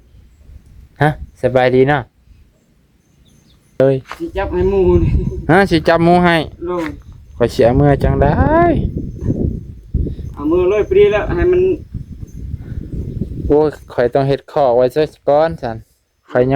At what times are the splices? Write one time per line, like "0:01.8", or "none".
0:03.8